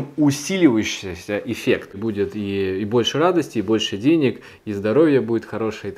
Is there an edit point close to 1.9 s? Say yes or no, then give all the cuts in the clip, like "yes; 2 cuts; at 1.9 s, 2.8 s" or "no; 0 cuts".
yes; 1 cut; at 1.9 s